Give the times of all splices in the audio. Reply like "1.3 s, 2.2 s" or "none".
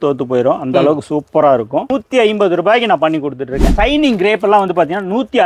2.0 s, 3.7 s